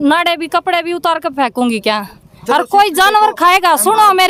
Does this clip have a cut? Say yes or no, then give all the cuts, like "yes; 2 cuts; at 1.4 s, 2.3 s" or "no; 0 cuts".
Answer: no; 0 cuts